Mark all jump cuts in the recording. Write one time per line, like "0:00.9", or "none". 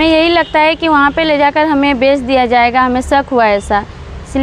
none